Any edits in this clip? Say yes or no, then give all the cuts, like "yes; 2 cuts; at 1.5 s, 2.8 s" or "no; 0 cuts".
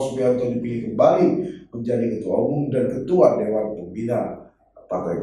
no; 0 cuts